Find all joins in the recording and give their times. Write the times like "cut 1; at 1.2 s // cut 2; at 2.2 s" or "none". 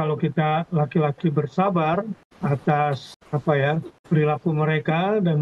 cut 1; at 2.2 s // cut 2; at 3.1 s // cut 3; at 3.9 s